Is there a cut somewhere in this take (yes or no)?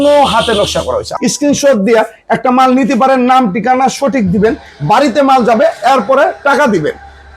yes